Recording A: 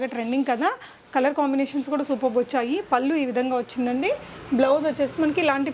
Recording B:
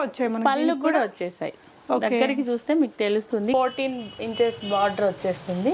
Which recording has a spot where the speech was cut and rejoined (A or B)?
B